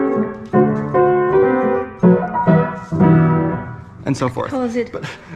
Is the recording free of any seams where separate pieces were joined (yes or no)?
yes